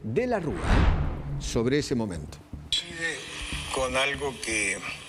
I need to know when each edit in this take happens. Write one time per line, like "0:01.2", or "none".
none